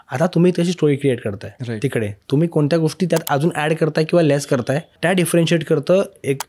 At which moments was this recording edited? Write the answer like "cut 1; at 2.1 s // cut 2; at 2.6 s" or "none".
cut 1; at 4.9 s